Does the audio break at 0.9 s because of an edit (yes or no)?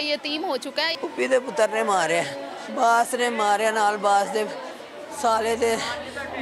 yes